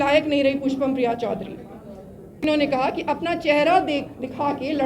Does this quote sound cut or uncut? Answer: cut